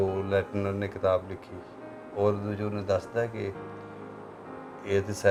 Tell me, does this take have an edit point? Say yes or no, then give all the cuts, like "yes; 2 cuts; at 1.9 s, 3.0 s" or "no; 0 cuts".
no; 0 cuts